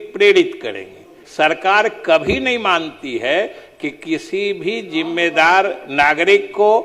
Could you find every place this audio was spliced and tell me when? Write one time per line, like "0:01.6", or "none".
0:01.2

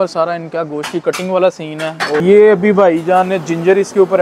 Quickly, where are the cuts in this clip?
0:02.2

